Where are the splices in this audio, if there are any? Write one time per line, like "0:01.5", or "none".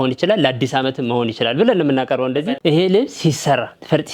0:02.5

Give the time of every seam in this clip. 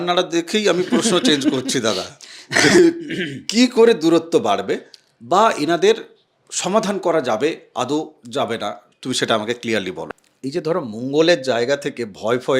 0:10.1

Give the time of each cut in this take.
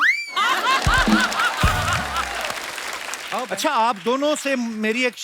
0:03.4

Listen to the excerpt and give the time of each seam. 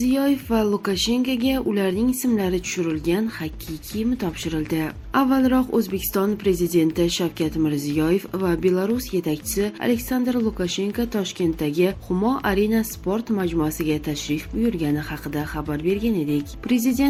none

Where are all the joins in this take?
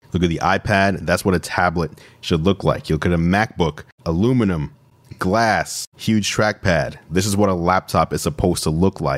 none

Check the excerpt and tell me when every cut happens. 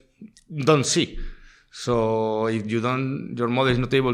none

